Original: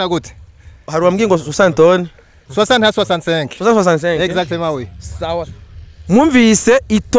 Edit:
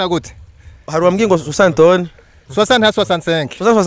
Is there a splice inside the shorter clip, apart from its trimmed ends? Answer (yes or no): no